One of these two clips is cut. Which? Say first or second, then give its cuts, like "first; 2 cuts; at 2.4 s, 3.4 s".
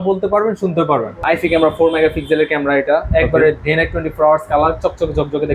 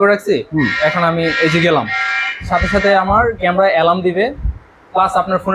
first; 1 cut; at 1.2 s